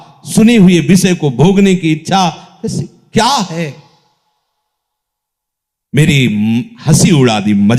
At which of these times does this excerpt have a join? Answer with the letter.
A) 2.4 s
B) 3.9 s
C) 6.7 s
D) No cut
D